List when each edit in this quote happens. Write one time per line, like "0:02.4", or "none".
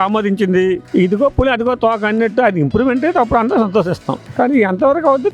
0:04.2

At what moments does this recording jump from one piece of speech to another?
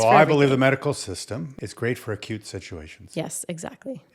0:01.5

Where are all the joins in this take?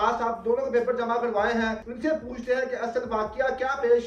0:01.9

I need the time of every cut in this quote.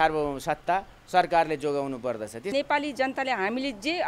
0:02.4

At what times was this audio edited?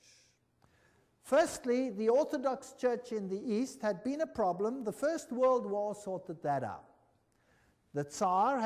0:04.0

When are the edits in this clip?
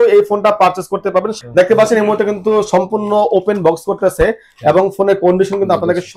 0:01.4

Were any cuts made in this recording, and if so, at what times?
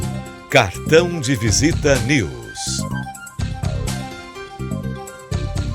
0:02.4
0:04.2

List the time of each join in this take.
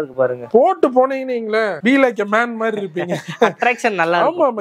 none

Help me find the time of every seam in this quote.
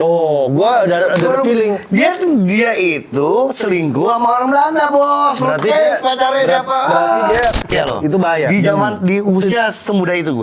0:07.7

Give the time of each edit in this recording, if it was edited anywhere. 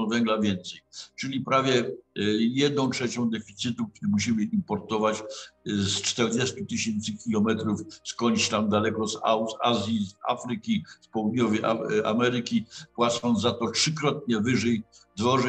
none

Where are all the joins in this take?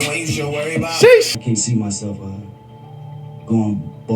0:01.4

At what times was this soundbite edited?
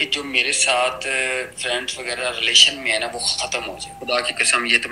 0:04.0

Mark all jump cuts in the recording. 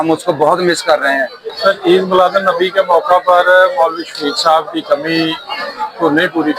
0:01.4

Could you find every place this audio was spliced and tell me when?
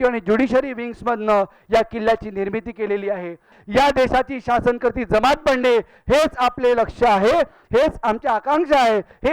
0:03.5

